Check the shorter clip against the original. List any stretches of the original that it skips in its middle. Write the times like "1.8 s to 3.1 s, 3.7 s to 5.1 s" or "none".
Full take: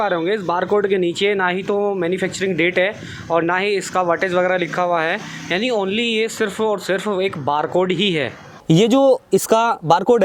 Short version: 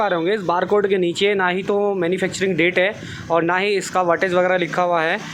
none